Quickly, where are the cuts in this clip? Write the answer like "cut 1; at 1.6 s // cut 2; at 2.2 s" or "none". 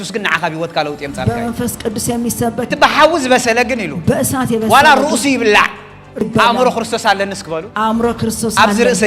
cut 1; at 2.7 s // cut 2; at 6.2 s